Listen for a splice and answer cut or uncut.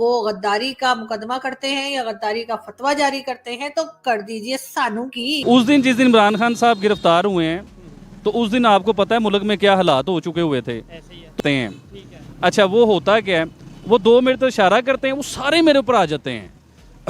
cut